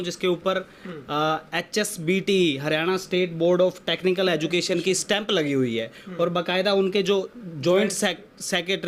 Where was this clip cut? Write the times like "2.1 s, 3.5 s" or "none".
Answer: none